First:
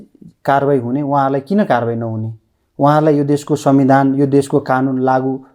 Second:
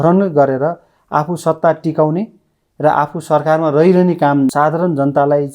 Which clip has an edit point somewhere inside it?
second; 1 cut; at 4.5 s

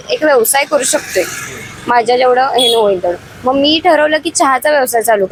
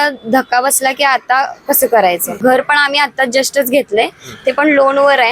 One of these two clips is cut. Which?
second; 1 cut; at 2.3 s

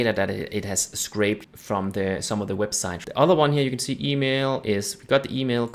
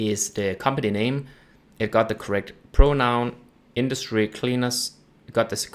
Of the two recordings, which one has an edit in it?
first; 2 cuts; at 1.5 s, 3.0 s

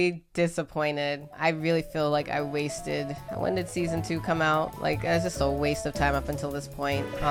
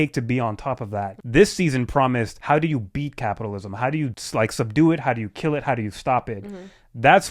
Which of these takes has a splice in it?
second; 3 cuts; at 1.2 s, 2.4 s, 4.2 s

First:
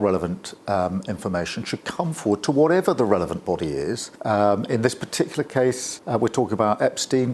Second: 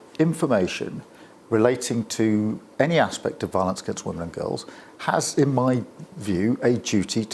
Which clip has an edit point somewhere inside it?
first; 2 cuts; at 4.1 s, 5.9 s

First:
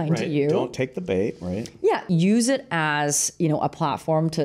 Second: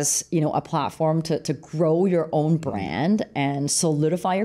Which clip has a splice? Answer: first; 1 cut; at 2.1 s

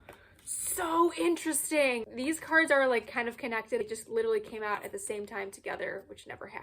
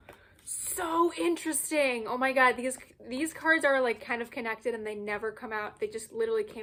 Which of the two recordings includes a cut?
first; 2 cuts; at 2.0 s, 3.8 s

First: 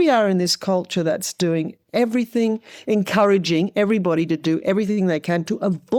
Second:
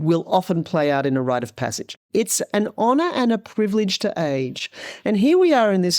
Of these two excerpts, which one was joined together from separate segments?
second; 1 cut; at 2.0 s

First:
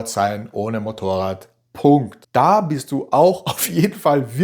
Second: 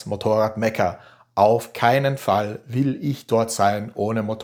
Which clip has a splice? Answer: first; 1 cut; at 2.2 s

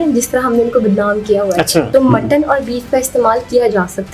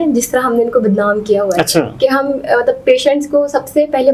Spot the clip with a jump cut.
first; 1 cut; at 1.9 s

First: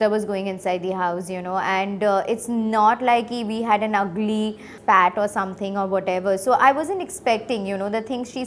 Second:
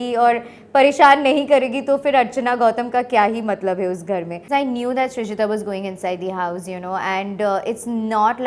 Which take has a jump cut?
second; 1 cut; at 4.4 s

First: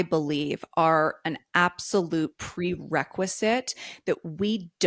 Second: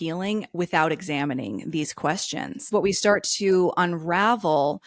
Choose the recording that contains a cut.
second; 1 cut; at 2.7 s

